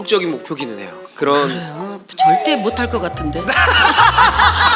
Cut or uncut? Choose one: uncut